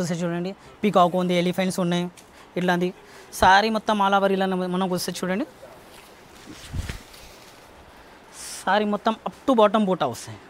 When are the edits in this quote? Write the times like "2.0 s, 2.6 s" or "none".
none